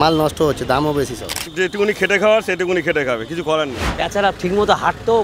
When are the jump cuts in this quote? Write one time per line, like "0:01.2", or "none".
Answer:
0:01.5
0:03.9